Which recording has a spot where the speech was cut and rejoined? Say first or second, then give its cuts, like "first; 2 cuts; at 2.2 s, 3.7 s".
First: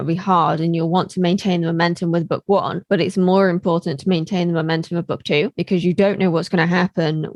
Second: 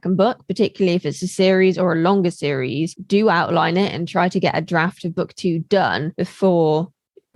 second; 1 cut; at 2.9 s